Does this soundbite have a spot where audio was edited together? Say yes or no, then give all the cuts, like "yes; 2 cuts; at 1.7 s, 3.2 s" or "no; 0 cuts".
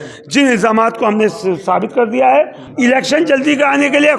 yes; 1 cut; at 2.6 s